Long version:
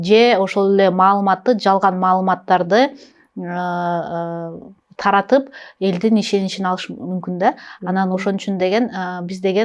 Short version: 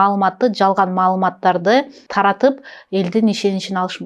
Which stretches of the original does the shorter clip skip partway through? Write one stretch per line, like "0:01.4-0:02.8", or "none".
0:03.0-0:04.9